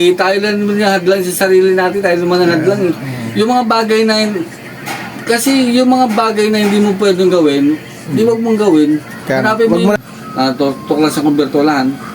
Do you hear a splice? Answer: yes; 1 cut; at 10.0 s

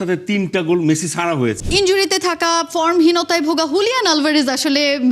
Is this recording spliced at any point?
yes; 1 cut; at 1.6 s

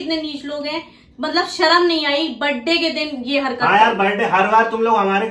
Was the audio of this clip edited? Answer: no; 0 cuts

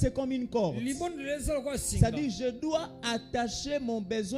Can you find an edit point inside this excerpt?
no; 0 cuts

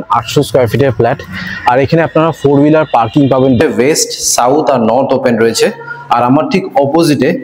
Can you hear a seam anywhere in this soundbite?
yes; 1 cut; at 3.6 s

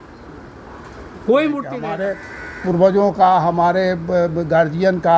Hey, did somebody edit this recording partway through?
yes; 1 cut; at 1.8 s

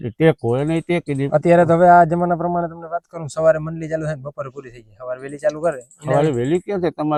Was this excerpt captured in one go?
yes; 0 cuts

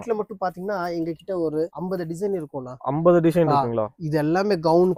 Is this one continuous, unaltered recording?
yes; 0 cuts

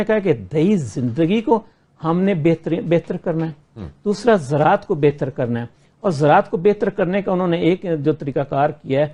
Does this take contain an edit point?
no; 0 cuts

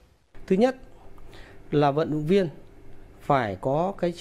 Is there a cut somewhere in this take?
no; 0 cuts

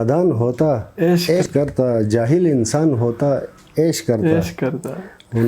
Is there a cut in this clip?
yes; 1 cut; at 1.5 s

